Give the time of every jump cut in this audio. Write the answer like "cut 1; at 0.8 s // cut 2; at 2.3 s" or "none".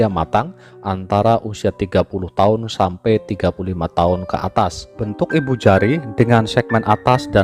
cut 1; at 5.0 s